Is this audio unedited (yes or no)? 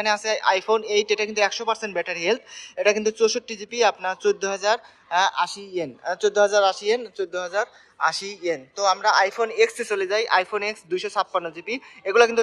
yes